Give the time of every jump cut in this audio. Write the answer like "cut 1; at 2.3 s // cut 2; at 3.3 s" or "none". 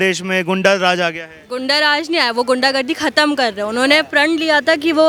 none